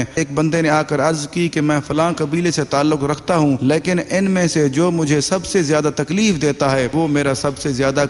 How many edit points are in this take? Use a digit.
2